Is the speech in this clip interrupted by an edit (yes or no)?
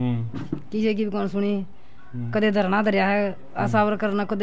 no